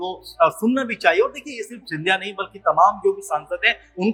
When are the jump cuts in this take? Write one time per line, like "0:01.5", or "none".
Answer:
none